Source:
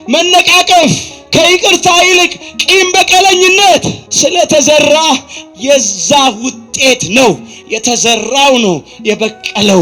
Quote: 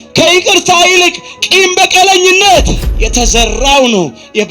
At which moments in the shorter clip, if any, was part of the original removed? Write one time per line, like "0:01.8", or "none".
0:02.8